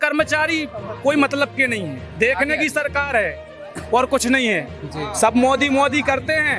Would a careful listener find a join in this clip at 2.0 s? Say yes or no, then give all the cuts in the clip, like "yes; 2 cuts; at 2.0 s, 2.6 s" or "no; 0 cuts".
yes; 1 cut; at 2.0 s